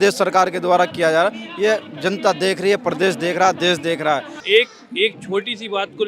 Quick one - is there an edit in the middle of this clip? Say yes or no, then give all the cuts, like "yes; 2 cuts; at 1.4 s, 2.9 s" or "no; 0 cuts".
yes; 1 cut; at 4.3 s